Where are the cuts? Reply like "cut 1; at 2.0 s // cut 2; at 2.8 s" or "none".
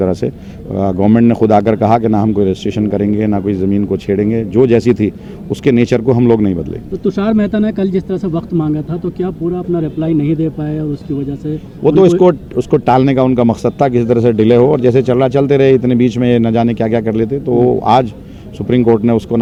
none